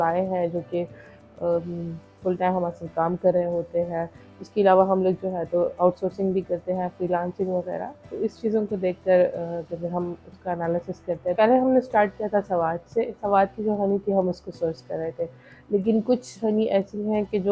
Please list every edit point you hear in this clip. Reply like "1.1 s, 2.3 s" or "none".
none